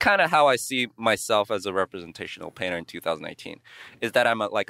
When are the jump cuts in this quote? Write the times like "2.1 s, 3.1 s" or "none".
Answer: none